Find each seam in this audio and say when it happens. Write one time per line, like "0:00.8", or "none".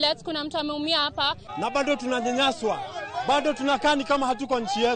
0:01.4